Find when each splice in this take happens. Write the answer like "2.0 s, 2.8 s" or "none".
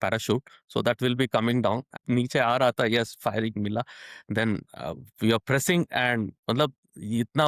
1.9 s